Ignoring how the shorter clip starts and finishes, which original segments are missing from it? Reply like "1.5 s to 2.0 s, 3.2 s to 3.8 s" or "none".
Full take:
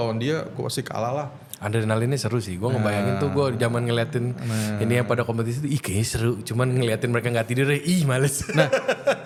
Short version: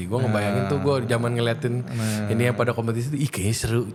none